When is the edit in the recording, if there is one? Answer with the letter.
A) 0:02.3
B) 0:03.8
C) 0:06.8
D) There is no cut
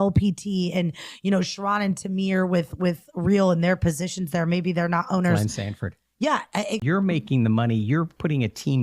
C